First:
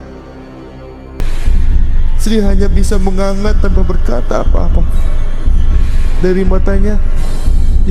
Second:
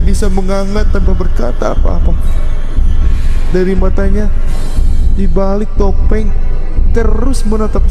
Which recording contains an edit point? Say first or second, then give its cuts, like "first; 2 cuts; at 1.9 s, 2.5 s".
first; 1 cut; at 1.2 s